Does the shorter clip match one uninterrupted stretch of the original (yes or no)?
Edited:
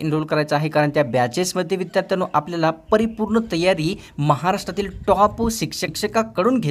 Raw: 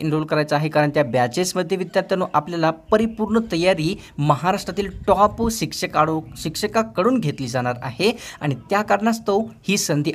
no